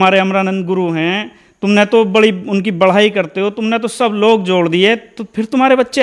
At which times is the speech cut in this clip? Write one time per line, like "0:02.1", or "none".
none